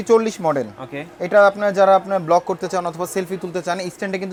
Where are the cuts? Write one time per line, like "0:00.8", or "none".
none